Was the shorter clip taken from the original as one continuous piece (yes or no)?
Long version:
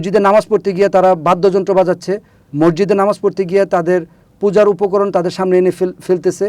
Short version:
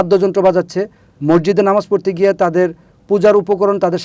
yes